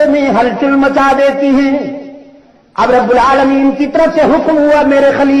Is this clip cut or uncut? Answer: uncut